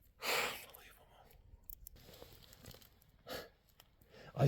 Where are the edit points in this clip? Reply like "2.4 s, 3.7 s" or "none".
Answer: 2.0 s